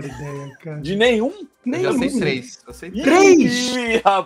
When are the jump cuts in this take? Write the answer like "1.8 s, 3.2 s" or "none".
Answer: none